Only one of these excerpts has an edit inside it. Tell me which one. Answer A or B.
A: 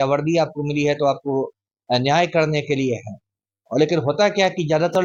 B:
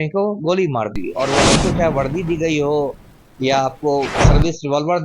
B